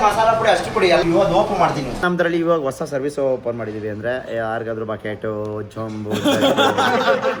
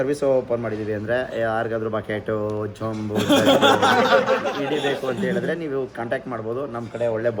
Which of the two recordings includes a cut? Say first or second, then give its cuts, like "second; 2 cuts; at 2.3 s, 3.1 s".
first; 1 cut; at 2.0 s